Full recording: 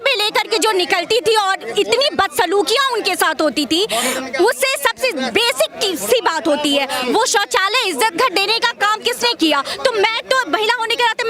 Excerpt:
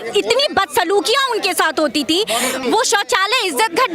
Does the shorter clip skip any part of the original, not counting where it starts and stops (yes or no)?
yes